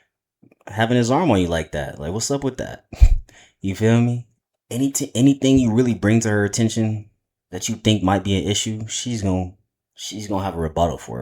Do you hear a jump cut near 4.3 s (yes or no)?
yes